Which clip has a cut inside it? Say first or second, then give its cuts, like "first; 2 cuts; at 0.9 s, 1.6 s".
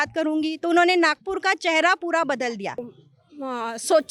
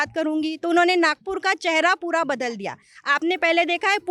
first; 1 cut; at 2.9 s